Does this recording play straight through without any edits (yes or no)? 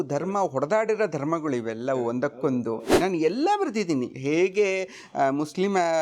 no